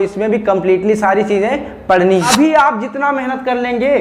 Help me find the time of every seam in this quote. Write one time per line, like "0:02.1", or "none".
0:02.3